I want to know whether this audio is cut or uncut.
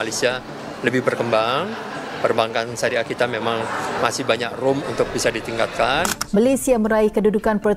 uncut